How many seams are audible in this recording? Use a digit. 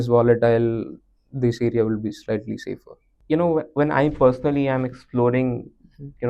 0